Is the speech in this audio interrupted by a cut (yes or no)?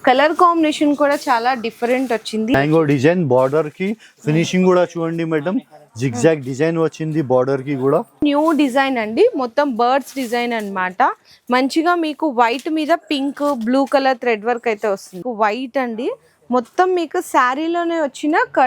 yes